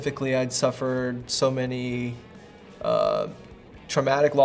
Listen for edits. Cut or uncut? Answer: uncut